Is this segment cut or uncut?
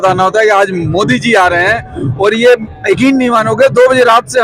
uncut